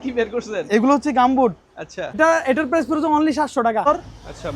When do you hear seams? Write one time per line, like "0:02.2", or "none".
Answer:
0:02.2
0:03.8